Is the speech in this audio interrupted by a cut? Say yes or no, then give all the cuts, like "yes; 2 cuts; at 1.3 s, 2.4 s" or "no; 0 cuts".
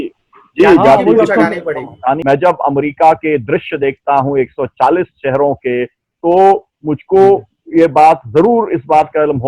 yes; 1 cut; at 2.2 s